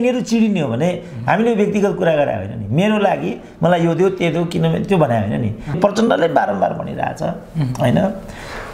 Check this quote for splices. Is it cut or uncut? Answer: cut